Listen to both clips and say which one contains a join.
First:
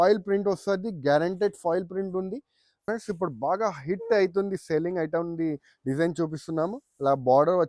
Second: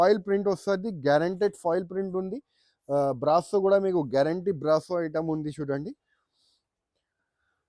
first; 1 cut; at 2.8 s

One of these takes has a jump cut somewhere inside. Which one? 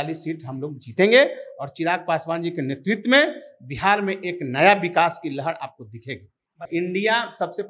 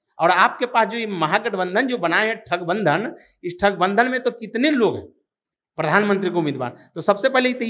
first; 1 cut; at 6.6 s

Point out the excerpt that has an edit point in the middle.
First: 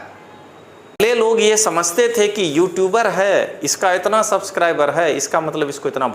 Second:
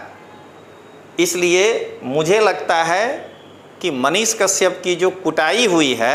first; 1 cut; at 1.0 s

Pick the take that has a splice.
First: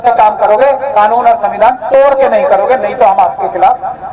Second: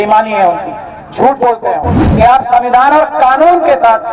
second; 1 cut; at 2.0 s

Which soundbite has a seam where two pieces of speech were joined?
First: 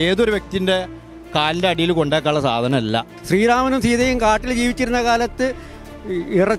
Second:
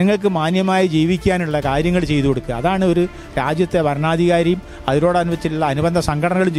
first; 1 cut; at 3.1 s

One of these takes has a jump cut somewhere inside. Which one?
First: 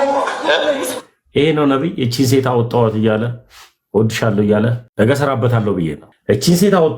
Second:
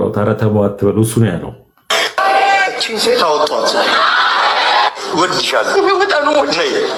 first; 2 cuts; at 4.8 s, 6.1 s

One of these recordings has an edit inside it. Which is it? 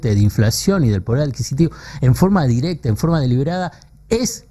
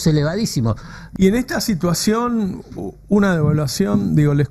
second; 1 cut; at 1.0 s

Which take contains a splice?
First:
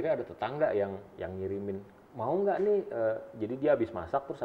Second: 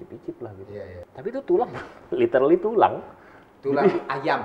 second; 1 cut; at 1.0 s

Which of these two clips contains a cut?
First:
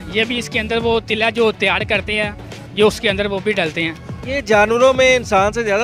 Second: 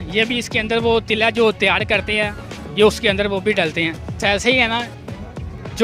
second; 1 cut; at 4.2 s

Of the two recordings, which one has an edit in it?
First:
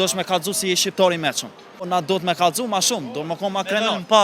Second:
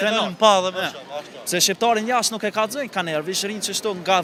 first; 1 cut; at 1.9 s

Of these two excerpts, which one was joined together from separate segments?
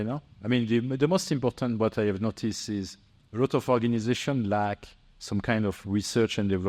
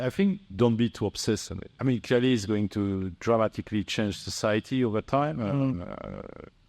second; 1 cut; at 1.7 s

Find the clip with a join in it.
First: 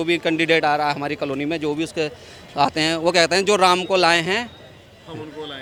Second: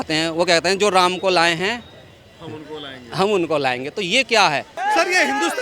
second; 1 cut; at 4.7 s

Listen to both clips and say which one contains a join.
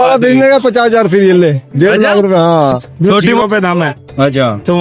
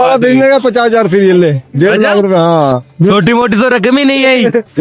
first; 1 cut; at 3.4 s

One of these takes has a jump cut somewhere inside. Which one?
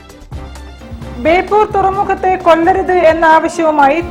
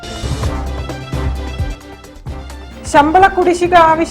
second; 1 cut; at 2.6 s

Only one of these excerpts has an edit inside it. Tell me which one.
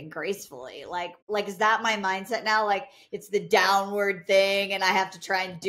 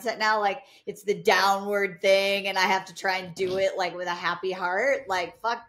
first; 1 cut; at 1.2 s

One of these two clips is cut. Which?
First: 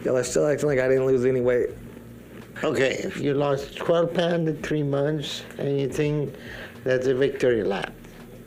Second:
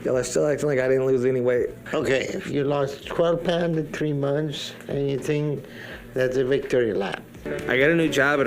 second; 2 cuts; at 1.8 s, 7.5 s

